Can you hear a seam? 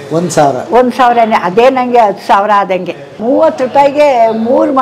yes; 1 cut; at 3.2 s

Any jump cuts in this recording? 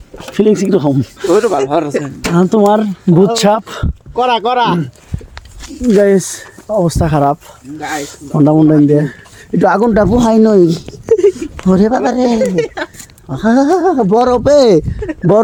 no; 0 cuts

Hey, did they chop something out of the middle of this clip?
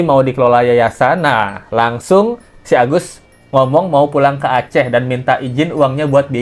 no; 0 cuts

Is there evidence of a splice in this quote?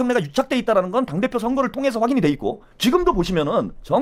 no; 0 cuts

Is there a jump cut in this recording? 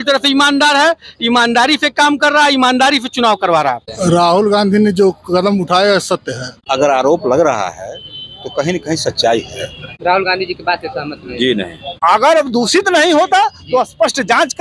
yes; 4 cuts; at 3.9 s, 6.5 s, 9.9 s, 11.9 s

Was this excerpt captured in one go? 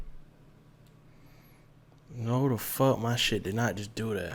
yes; 0 cuts

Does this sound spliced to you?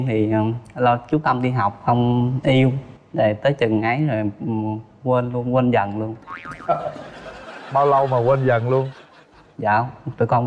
no; 0 cuts

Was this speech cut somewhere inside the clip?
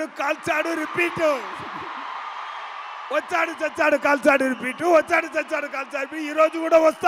no; 0 cuts

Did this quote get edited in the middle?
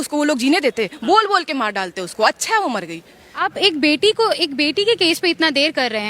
yes; 1 cut; at 3.4 s

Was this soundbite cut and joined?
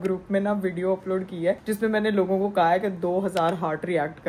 no; 0 cuts

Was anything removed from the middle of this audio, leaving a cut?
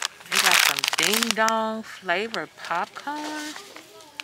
no; 0 cuts

